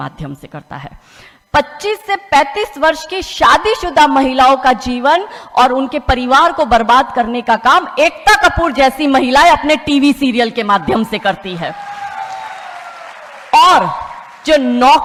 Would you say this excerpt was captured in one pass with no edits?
yes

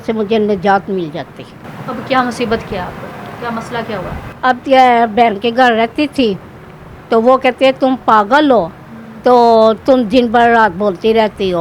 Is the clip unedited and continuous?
yes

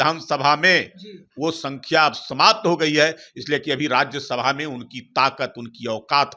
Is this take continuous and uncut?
yes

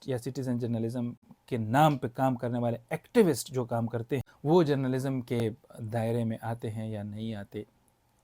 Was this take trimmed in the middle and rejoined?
yes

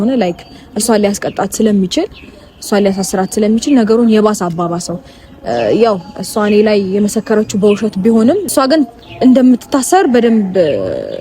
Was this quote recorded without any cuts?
no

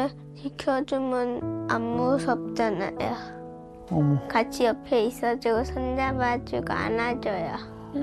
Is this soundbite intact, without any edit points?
yes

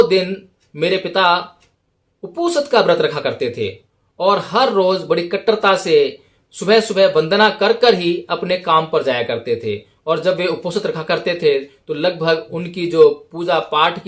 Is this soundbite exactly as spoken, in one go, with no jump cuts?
yes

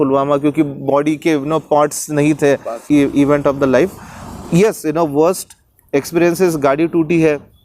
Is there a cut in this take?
yes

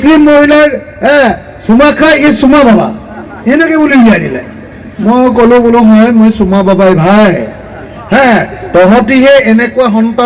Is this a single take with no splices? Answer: yes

